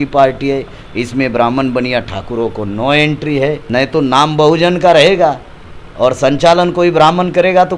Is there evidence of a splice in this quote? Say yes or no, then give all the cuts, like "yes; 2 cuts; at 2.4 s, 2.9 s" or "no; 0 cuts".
no; 0 cuts